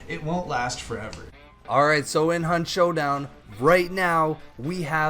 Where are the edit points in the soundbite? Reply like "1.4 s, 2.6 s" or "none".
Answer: 1.2 s